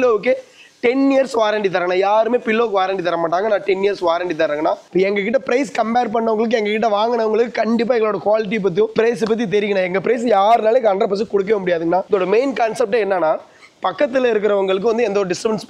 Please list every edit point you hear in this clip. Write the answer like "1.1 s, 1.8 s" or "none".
4.8 s, 8.9 s, 12.0 s